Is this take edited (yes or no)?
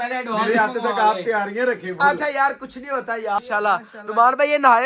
yes